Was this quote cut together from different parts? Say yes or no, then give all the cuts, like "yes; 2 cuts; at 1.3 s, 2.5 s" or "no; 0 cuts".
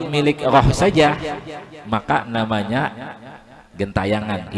no; 0 cuts